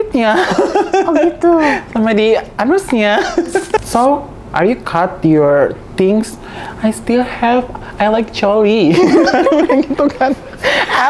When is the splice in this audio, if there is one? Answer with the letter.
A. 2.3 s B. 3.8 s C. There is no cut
B